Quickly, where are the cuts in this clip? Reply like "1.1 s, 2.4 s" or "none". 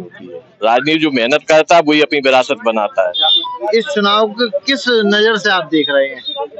3.5 s